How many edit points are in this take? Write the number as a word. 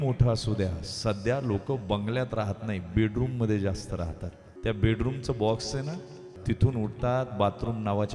two